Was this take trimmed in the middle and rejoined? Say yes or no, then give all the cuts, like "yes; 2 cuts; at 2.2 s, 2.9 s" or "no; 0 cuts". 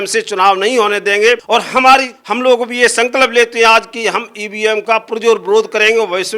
yes; 2 cuts; at 1.4 s, 2.2 s